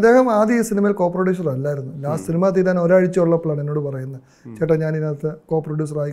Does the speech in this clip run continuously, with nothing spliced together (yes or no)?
yes